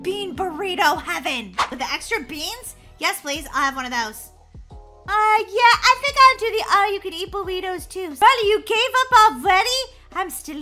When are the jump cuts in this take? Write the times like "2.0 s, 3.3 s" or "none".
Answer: 1.6 s, 8.0 s